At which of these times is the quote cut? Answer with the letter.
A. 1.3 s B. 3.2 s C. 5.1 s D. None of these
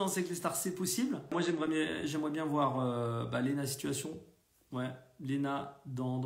A